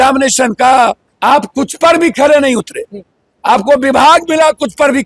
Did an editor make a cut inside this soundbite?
yes; 1 cut; at 1.1 s

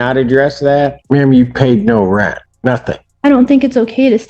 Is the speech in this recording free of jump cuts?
no; 2 cuts; at 1.0 s, 2.8 s

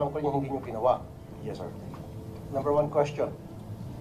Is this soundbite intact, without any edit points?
yes; 0 cuts

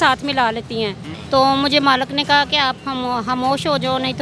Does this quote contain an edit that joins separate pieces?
yes; 1 cut; at 1.1 s

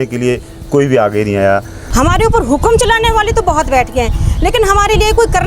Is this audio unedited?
no; 1 cut; at 1.8 s

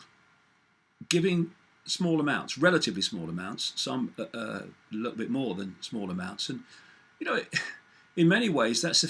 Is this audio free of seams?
no; 1 cut; at 2.2 s

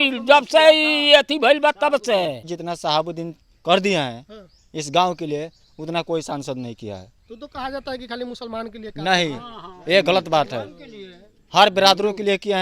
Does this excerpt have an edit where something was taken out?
yes; 1 cut; at 2.5 s

